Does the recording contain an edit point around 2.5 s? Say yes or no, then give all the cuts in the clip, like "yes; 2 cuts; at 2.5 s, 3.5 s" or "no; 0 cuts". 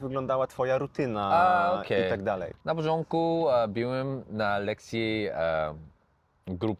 no; 0 cuts